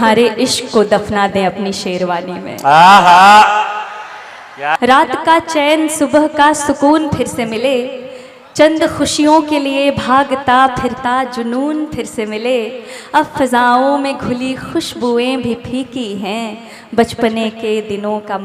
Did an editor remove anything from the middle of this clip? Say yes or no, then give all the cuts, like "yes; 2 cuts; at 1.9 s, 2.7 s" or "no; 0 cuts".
yes; 1 cut; at 4.7 s